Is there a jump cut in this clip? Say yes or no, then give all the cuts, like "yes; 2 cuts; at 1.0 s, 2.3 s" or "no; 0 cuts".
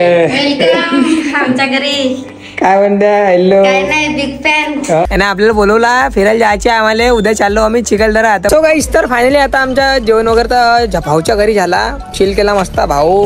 yes; 2 cuts; at 5.1 s, 8.5 s